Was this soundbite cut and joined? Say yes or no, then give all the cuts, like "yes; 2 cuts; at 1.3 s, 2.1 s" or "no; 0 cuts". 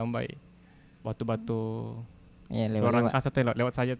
no; 0 cuts